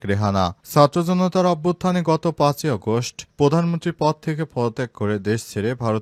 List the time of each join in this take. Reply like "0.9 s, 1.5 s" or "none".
none